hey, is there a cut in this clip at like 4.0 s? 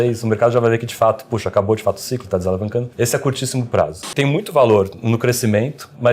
yes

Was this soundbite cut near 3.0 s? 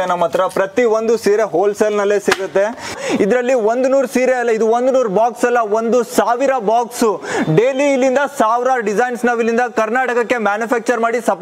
yes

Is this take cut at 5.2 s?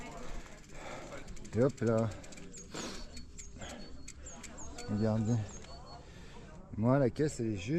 no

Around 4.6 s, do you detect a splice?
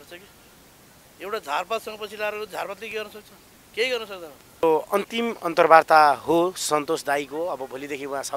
yes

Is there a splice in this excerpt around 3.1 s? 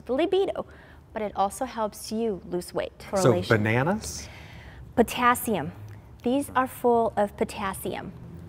yes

